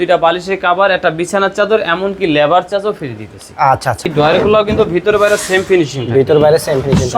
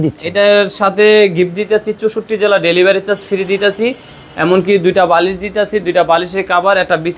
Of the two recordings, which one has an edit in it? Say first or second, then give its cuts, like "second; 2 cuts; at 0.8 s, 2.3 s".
first; 1 cut; at 4.1 s